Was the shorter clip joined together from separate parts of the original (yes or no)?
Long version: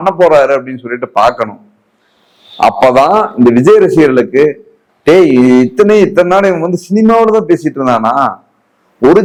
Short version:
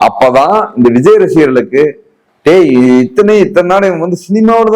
no